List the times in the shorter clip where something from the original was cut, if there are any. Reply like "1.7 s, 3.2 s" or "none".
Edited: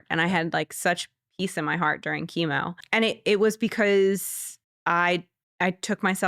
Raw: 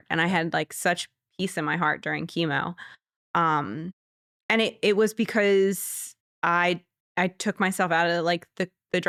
2.8 s